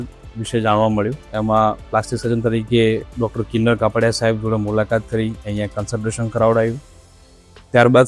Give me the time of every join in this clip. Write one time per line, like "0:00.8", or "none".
none